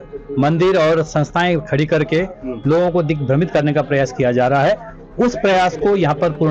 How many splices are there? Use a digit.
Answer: 0